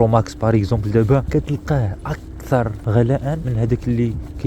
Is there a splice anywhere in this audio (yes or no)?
yes